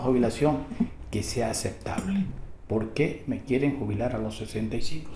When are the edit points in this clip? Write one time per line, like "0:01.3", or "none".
0:02.1